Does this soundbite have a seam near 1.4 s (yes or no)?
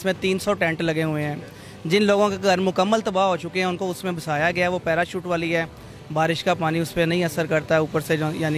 no